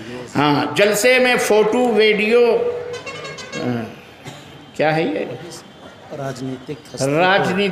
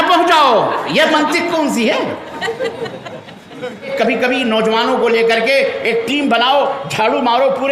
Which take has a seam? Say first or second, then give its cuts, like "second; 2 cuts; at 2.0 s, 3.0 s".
second; 1 cut; at 3.9 s